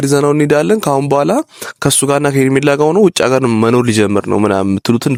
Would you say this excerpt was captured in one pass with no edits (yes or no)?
yes